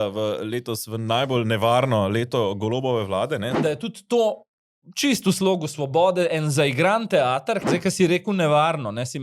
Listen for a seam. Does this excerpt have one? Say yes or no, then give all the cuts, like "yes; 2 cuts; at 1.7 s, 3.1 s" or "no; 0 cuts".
yes; 2 cuts; at 3.6 s, 7.7 s